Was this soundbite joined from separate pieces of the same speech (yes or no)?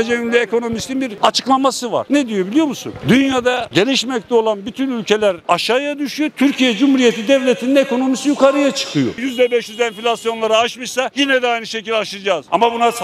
yes